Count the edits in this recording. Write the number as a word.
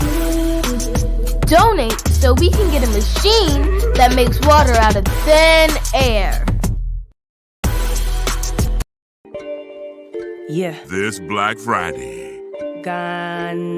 two